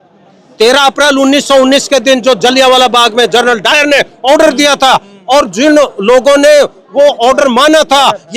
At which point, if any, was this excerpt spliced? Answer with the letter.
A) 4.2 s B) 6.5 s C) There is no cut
C